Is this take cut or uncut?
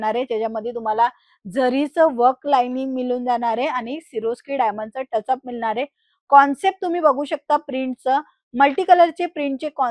uncut